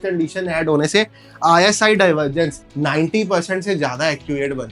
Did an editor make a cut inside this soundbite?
no; 0 cuts

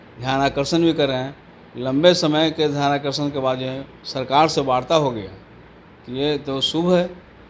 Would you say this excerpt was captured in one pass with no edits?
yes; 0 cuts

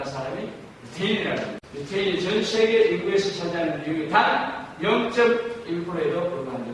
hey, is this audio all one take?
no; 1 cut; at 1.6 s

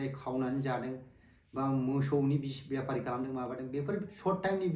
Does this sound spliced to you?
no; 0 cuts

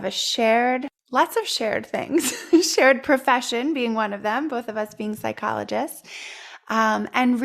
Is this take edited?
yes; 1 cut; at 1.0 s

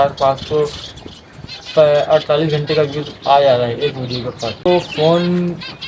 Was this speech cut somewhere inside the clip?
yes; 1 cut; at 4.6 s

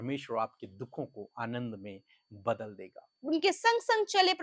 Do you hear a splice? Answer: yes; 1 cut; at 3.2 s

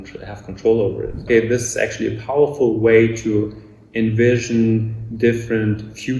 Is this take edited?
yes; 1 cut; at 1.2 s

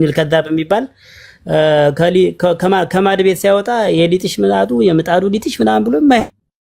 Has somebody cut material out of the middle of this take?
no; 0 cuts

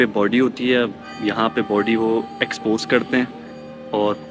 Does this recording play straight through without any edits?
yes; 0 cuts

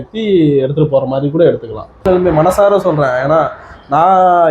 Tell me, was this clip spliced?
yes; 1 cut; at 2.0 s

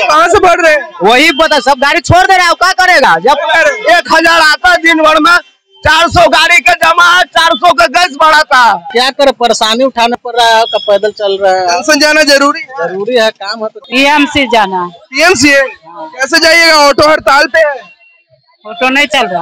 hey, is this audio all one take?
no; 2 cuts; at 8.8 s, 13.8 s

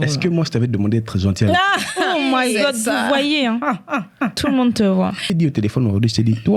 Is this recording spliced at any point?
yes; 1 cut; at 5.2 s

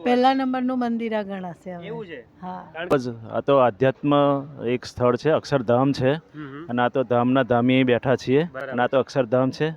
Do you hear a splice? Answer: yes; 2 cuts; at 2.9 s, 8.6 s

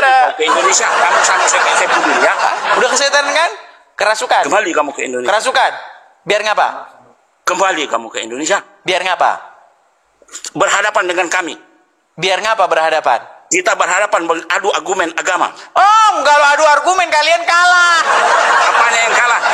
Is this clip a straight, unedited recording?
yes; 0 cuts

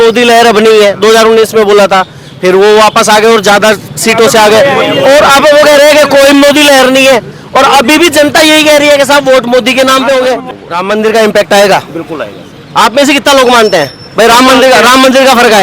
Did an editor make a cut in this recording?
yes; 1 cut; at 10.5 s

